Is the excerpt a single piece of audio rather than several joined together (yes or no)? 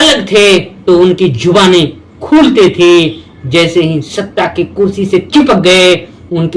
yes